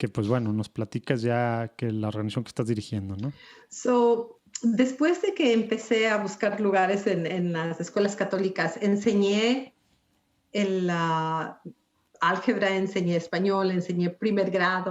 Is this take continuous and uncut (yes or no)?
yes